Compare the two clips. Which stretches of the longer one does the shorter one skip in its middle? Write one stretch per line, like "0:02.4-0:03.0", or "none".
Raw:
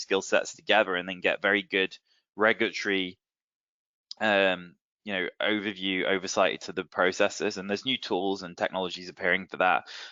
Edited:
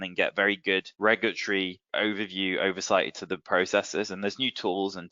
0:02.0-0:02.3
0:03.2-0:05.3